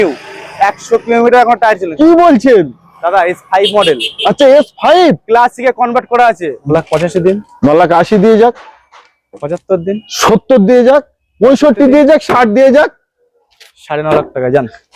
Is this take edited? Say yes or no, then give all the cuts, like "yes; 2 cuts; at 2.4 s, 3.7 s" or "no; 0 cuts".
yes; 1 cut; at 6.5 s